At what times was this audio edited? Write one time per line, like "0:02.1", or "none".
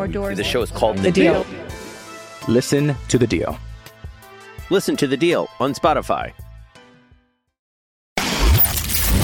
0:08.1

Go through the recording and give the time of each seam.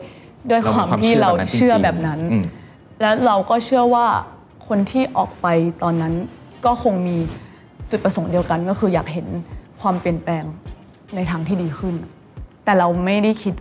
none

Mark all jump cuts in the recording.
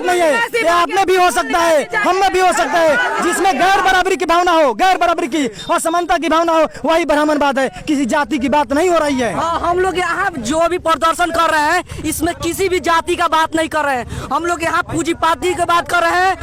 none

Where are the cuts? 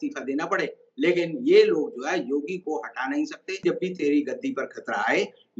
0:03.6

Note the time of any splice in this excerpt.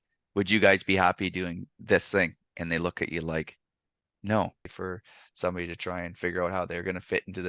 0:04.7

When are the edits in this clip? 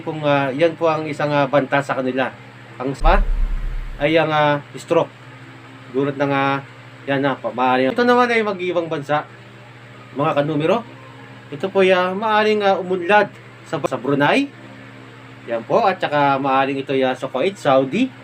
0:03.0
0:07.9
0:13.8

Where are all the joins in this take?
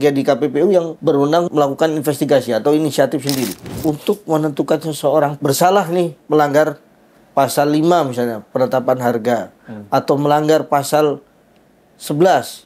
0:01.4
0:03.6
0:05.4

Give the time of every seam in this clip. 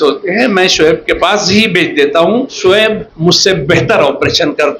0:02.6

